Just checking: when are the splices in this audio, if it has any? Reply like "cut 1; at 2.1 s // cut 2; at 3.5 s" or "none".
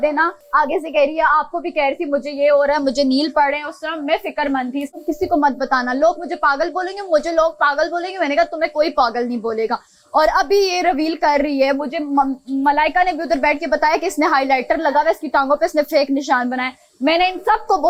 none